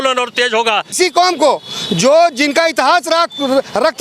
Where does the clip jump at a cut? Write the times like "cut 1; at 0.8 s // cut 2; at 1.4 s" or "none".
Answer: cut 1; at 0.9 s